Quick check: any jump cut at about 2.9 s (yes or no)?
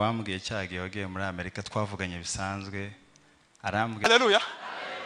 no